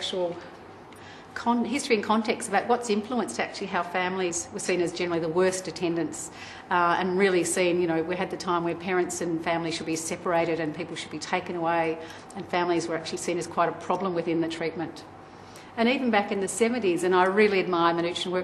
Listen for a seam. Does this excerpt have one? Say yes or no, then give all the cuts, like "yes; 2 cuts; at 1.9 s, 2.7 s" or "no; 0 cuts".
no; 0 cuts